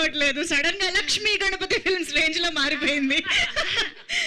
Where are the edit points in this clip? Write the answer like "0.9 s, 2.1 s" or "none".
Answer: none